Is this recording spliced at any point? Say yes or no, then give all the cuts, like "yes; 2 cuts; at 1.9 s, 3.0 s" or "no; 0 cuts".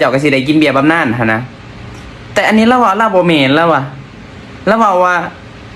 no; 0 cuts